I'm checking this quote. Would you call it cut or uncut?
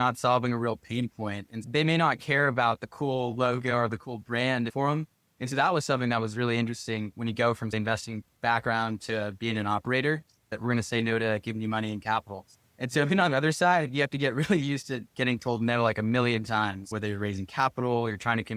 cut